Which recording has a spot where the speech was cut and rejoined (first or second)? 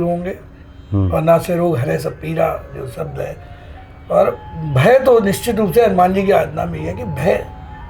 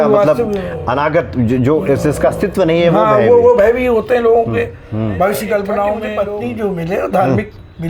second